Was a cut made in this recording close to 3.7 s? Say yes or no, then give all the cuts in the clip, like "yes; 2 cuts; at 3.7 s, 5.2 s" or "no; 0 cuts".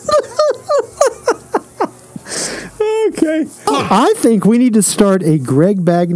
yes; 1 cut; at 3.7 s